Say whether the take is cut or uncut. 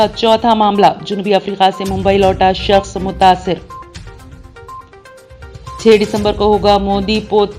uncut